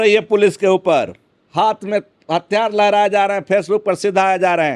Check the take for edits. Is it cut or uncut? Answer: uncut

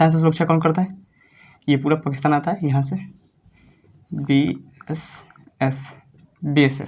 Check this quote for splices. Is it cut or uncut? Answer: uncut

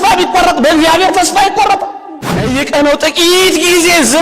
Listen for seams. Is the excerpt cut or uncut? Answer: cut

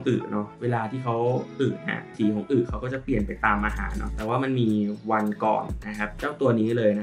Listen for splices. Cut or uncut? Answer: uncut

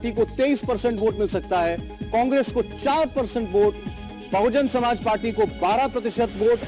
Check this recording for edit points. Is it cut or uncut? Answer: uncut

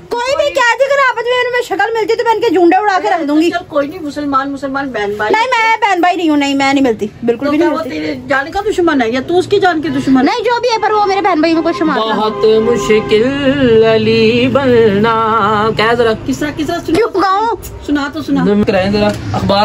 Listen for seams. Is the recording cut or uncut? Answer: cut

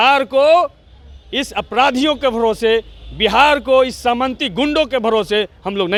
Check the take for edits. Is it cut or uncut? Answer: uncut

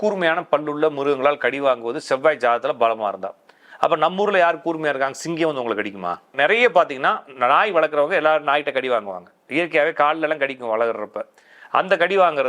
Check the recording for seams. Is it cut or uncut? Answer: cut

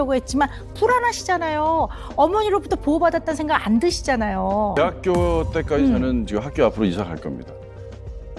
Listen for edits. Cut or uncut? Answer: cut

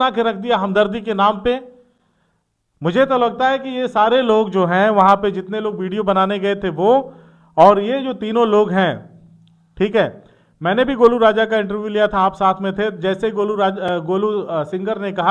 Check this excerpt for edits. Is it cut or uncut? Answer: uncut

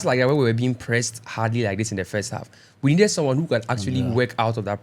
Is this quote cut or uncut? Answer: uncut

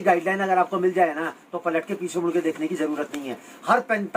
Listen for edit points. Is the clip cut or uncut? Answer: uncut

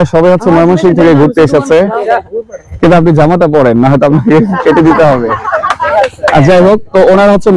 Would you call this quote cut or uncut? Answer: uncut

